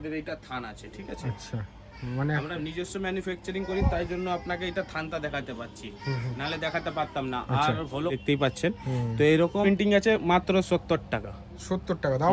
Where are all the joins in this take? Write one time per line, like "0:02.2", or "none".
0:08.2
0:09.6